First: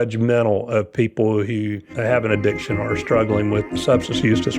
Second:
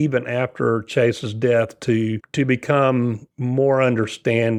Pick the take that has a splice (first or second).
first